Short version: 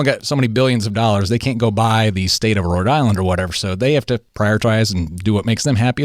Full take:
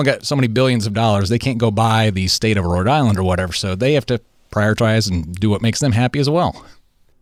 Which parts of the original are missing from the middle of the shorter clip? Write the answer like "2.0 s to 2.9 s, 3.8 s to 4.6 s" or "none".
4.3 s to 4.4 s